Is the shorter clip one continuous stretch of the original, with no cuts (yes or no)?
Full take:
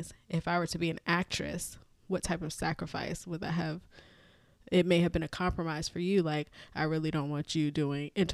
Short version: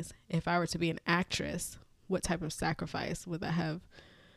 yes